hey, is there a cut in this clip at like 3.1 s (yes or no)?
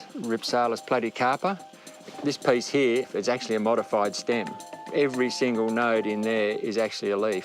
yes